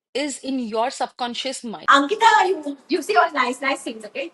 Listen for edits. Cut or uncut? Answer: cut